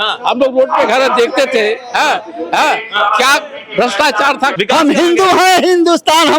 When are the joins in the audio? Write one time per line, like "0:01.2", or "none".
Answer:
0:04.5